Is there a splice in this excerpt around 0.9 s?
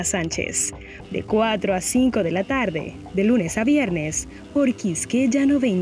yes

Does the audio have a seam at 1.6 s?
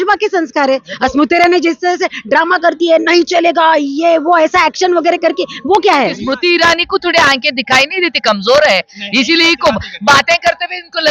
no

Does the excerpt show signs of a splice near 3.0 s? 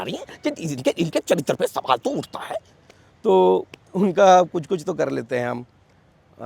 no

